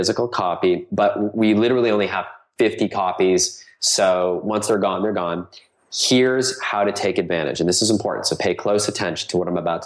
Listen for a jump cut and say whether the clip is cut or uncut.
uncut